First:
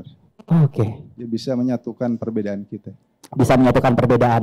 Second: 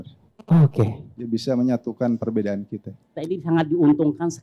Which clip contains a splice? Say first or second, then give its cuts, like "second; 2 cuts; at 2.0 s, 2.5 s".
second; 1 cut; at 3.2 s